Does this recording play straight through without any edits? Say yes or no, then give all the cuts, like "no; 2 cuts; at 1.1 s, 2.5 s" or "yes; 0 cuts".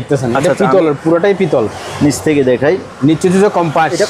yes; 0 cuts